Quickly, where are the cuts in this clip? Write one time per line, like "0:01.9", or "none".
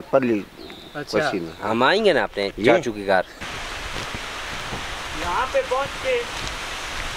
0:03.4